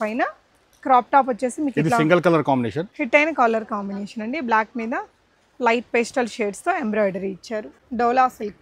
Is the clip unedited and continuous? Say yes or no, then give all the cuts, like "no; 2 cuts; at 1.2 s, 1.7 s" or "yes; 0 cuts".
no; 2 cuts; at 2.9 s, 7.8 s